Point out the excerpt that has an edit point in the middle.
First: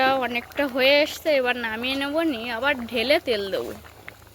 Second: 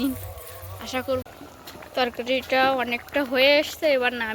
second; 1 cut; at 1.2 s

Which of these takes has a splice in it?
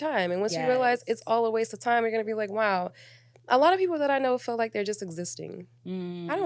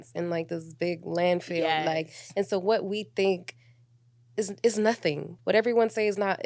second; 1 cut; at 5.3 s

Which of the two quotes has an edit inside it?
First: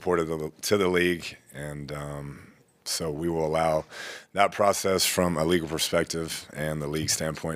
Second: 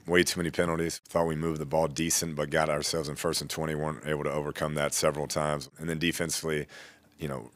second; 2 cuts; at 1.0 s, 5.7 s

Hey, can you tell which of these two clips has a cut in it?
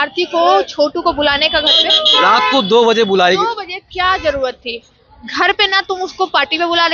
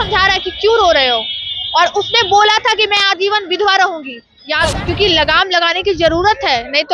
second; 1 cut; at 4.7 s

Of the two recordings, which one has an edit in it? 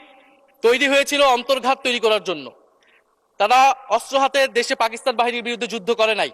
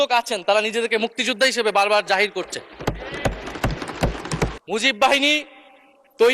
second; 1 cut; at 4.5 s

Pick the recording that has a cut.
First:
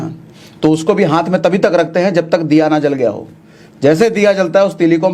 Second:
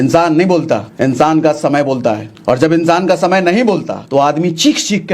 second; 3 cuts; at 0.9 s, 2.3 s, 3.9 s

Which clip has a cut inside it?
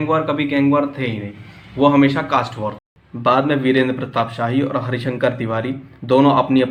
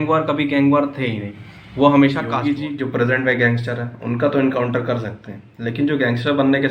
second; 1 cut; at 2.3 s

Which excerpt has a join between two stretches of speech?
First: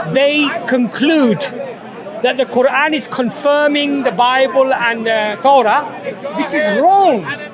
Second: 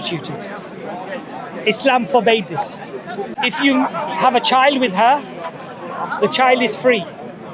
second; 1 cut; at 3.3 s

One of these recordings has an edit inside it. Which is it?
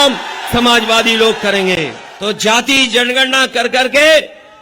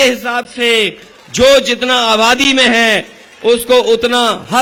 first; 1 cut; at 2.0 s

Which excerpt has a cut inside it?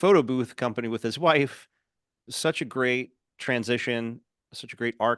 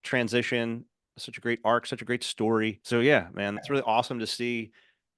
second; 2 cuts; at 2.8 s, 3.6 s

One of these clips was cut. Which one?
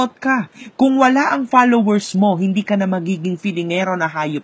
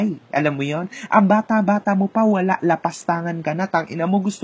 first; 1 cut; at 1.6 s

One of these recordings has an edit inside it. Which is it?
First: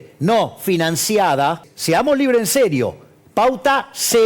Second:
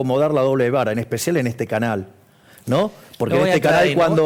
first; 1 cut; at 1.7 s

